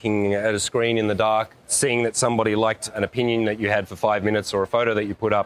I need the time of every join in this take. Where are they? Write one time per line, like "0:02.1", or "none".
0:02.9